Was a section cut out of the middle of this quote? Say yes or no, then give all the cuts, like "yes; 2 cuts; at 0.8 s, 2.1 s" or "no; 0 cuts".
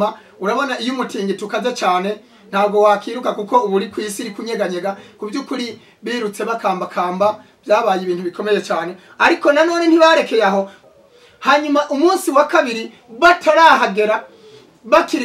yes; 1 cut; at 10.8 s